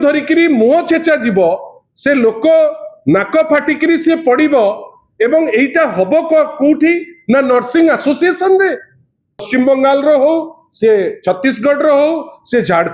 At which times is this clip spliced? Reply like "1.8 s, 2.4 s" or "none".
9.5 s